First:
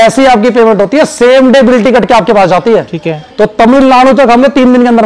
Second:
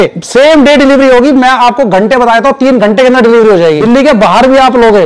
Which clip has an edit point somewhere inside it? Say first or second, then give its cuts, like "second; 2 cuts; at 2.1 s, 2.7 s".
second; 1 cut; at 3.8 s